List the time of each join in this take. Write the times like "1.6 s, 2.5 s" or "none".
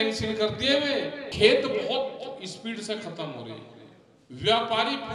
1.3 s